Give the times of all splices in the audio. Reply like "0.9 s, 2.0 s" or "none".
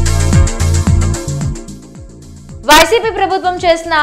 2.1 s